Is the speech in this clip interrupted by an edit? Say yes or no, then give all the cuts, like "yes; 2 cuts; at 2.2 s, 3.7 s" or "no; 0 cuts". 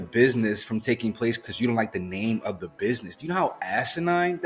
no; 0 cuts